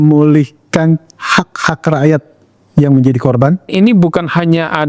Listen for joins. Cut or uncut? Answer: cut